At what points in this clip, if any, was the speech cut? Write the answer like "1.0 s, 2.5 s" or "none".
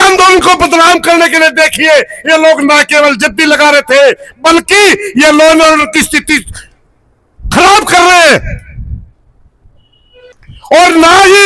10.4 s